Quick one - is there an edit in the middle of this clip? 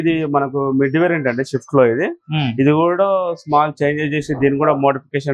no; 0 cuts

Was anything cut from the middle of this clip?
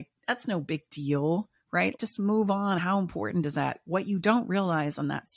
no; 0 cuts

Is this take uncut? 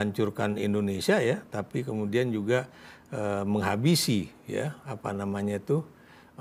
yes; 0 cuts

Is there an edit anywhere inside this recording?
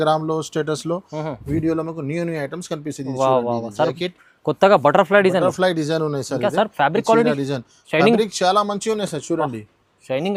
no; 0 cuts

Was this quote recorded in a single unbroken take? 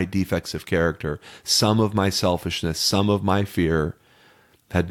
yes; 0 cuts

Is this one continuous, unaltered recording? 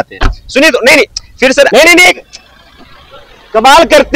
no; 1 cut; at 1.7 s

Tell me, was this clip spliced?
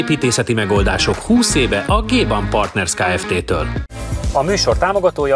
no; 0 cuts

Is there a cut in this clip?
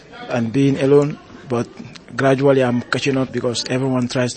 yes; 1 cut; at 3.3 s

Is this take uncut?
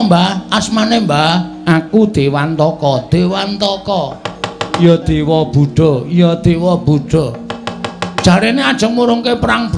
yes; 0 cuts

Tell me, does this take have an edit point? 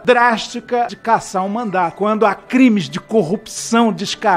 yes; 1 cut; at 0.9 s

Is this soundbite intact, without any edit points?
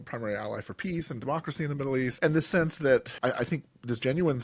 no; 2 cuts; at 2.1 s, 3.1 s

